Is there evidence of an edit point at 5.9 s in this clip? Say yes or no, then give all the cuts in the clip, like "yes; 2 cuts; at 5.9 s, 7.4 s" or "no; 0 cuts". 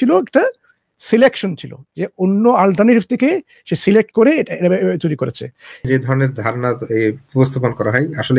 yes; 1 cut; at 5.9 s